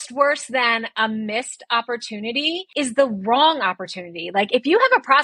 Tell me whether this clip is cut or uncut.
cut